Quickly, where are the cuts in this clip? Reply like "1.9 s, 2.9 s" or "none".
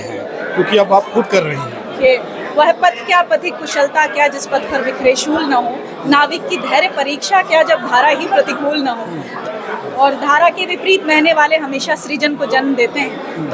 2.0 s, 9.4 s